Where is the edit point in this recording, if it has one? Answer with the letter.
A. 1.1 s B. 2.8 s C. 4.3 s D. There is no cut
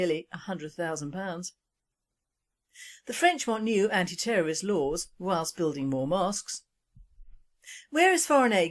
A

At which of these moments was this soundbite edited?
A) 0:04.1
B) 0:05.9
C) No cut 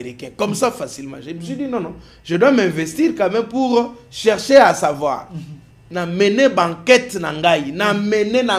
B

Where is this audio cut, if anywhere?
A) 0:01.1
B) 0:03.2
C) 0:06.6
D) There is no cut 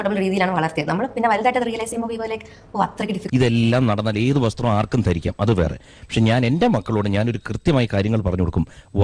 B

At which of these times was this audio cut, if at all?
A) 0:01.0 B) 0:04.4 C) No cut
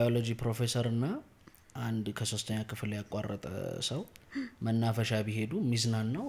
C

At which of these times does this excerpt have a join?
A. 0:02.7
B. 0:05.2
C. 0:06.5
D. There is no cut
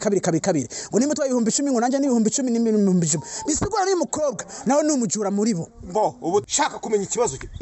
C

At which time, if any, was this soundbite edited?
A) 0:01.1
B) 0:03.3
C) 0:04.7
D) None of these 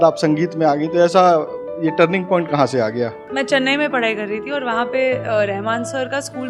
B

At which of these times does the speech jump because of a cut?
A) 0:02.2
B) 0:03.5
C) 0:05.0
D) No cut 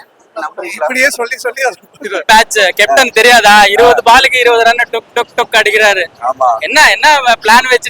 A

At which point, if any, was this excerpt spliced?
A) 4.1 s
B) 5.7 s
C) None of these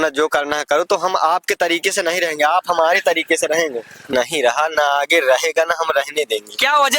A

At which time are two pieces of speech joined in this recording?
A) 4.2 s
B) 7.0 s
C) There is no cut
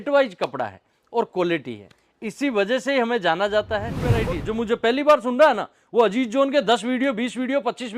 A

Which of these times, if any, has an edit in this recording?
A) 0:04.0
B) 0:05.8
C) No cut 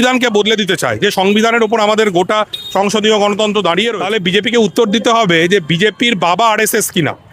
A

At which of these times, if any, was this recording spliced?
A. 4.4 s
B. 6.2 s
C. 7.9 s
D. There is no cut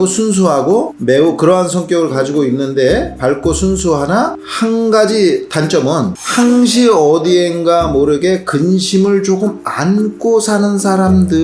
B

